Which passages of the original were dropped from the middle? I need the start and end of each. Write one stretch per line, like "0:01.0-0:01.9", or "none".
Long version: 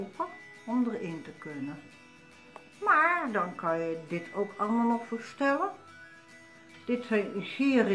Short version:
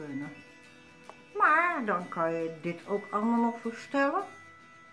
none